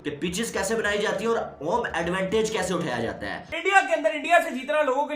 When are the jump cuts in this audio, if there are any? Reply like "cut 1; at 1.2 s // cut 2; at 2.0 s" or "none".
cut 1; at 3.5 s